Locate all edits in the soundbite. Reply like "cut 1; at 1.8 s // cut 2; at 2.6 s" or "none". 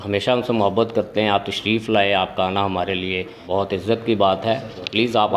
cut 1; at 3.4 s